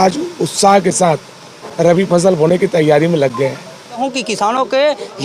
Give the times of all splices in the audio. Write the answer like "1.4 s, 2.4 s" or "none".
4.0 s

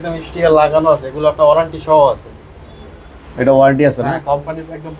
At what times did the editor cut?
none

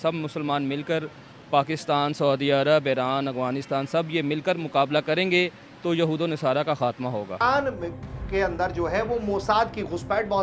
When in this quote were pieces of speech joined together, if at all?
7.4 s

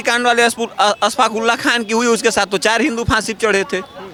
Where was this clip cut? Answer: none

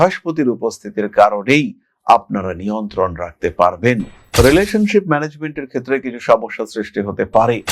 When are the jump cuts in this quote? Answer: 4.2 s

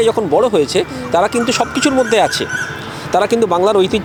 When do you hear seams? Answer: none

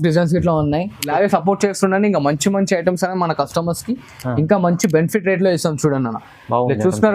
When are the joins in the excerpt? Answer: 1.0 s

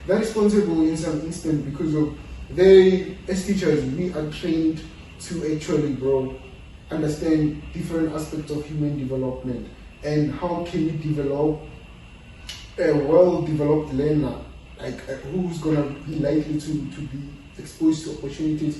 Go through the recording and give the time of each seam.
none

